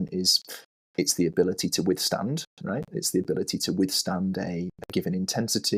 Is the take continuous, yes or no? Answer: yes